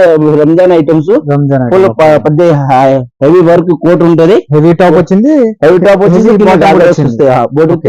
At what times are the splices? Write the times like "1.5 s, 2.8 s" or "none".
none